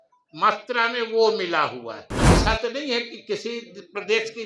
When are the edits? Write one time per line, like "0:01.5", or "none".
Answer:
0:02.3